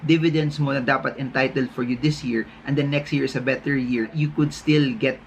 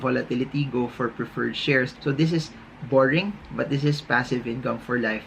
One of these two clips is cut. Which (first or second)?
second